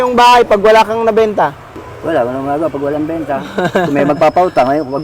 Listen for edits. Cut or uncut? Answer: cut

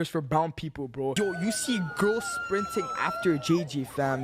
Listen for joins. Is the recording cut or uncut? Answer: cut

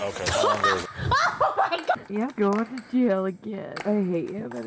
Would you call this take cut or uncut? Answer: cut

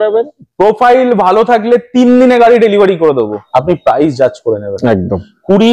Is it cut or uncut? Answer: cut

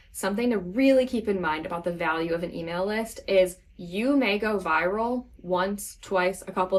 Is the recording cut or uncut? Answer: uncut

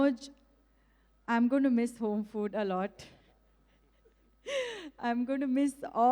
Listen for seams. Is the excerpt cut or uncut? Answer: uncut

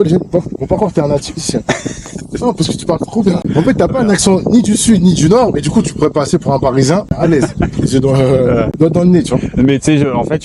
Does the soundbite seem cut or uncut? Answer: cut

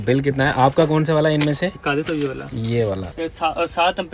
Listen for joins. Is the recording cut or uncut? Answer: cut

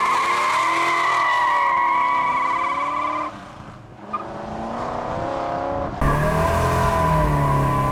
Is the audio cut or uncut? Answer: uncut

